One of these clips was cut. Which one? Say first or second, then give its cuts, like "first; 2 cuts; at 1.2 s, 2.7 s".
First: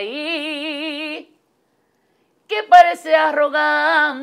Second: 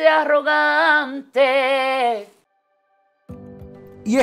second; 1 cut; at 2.4 s